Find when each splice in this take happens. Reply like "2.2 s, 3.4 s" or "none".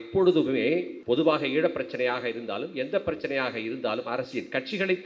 0.9 s